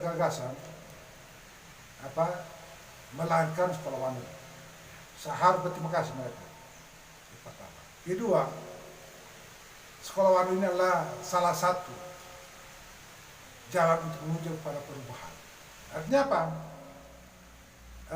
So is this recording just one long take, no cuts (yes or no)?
no